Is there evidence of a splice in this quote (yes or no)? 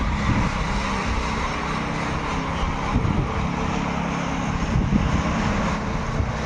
no